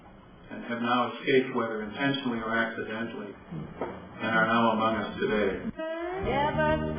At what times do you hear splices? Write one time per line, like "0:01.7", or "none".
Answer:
0:05.7

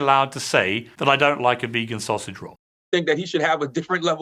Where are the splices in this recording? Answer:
0:00.9
0:02.8

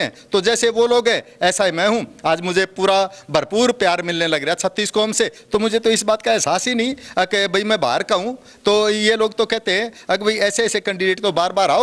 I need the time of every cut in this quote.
none

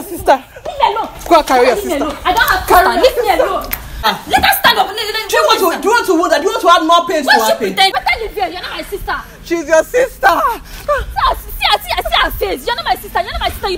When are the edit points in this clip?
0:04.1
0:07.9

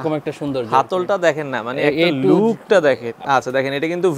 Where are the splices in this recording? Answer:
0:03.1

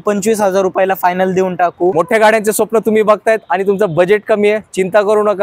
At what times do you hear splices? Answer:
0:01.9

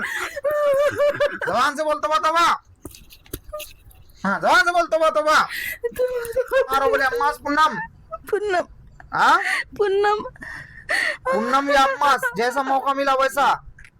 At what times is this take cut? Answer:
0:06.7

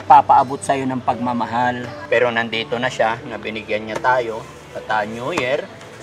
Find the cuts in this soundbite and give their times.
0:01.9

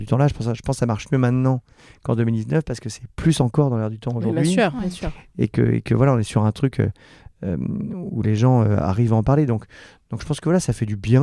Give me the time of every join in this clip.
none

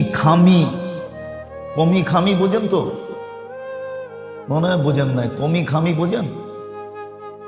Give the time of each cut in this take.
none

